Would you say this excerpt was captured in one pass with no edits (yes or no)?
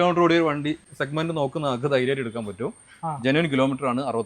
no